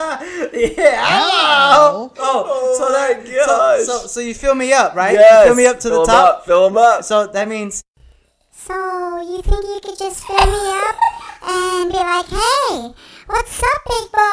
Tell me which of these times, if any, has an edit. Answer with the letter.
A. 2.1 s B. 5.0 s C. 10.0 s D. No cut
A